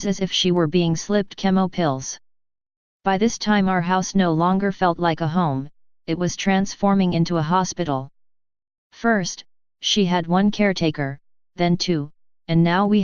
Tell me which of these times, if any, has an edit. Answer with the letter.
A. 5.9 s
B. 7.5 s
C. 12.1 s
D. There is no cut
B